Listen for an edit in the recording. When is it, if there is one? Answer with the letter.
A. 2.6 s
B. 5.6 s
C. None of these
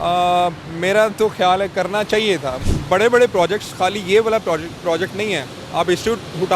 A